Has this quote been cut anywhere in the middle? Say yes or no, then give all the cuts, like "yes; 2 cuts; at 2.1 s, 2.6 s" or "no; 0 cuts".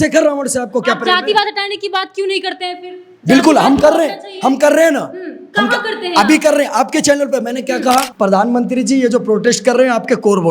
yes; 1 cut; at 8.1 s